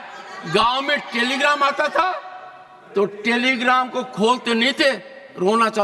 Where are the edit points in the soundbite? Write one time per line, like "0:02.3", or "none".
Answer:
none

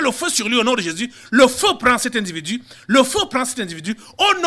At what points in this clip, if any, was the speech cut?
0:02.6

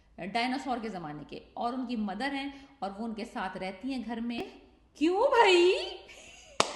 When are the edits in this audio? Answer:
0:04.4

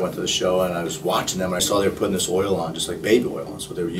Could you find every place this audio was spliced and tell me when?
0:01.6

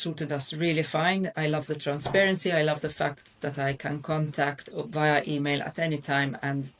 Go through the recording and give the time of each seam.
none

